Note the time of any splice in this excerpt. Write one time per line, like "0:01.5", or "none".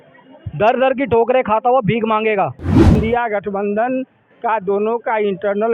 0:03.0